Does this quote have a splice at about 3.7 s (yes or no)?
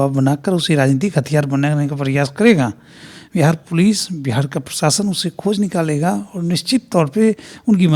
no